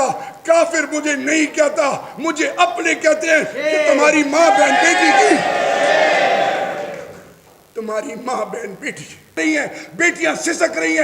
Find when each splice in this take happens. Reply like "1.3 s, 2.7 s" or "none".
9.3 s